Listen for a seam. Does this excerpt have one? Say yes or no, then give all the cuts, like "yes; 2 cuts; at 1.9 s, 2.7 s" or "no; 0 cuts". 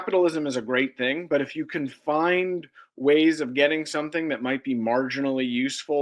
no; 0 cuts